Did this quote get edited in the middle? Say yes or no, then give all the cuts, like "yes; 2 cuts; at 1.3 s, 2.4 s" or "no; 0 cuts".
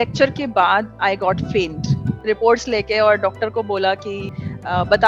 yes; 1 cut; at 2.2 s